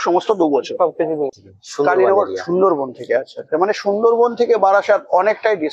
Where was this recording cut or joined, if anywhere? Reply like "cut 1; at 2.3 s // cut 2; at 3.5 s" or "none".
cut 1; at 1.3 s